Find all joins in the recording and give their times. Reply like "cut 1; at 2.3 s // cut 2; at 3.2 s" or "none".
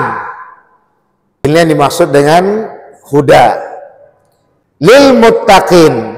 cut 1; at 1.4 s // cut 2; at 4.9 s